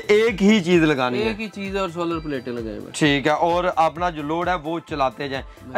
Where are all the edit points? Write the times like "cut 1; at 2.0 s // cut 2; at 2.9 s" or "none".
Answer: none